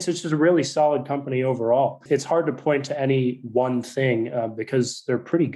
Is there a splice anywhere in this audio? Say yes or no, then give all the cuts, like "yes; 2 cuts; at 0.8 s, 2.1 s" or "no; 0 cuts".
yes; 1 cut; at 2.0 s